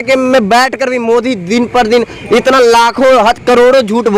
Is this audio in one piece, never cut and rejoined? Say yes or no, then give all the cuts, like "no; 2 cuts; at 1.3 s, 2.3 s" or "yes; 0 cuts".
yes; 0 cuts